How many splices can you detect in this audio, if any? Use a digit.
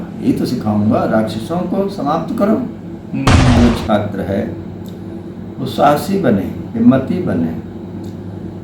1